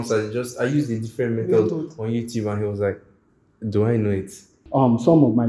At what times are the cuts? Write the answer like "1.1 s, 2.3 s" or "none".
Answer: 4.6 s